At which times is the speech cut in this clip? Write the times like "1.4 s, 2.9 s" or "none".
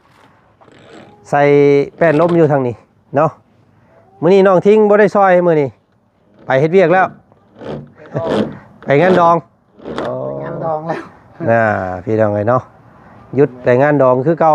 none